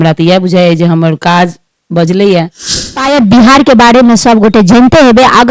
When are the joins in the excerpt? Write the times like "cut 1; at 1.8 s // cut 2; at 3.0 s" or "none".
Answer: cut 1; at 2.9 s